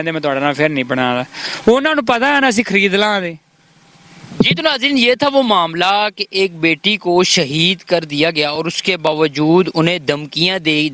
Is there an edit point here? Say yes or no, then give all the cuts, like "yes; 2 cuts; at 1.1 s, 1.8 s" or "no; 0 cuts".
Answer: no; 0 cuts